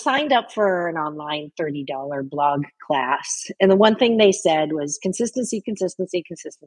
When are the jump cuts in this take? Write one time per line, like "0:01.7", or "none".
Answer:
none